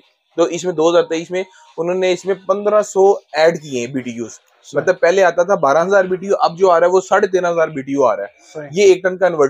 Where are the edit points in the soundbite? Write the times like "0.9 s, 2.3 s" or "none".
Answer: none